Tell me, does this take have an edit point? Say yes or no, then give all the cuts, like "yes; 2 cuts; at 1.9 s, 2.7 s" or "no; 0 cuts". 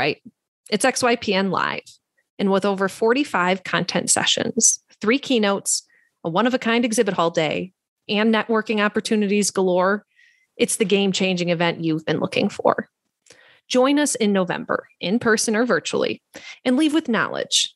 no; 0 cuts